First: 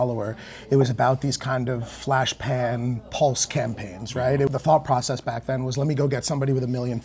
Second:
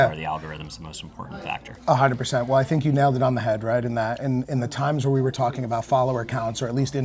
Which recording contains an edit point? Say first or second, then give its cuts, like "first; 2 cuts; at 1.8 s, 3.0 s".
first; 1 cut; at 4.5 s